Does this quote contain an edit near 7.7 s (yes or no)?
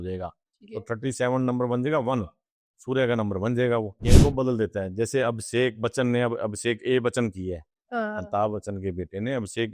no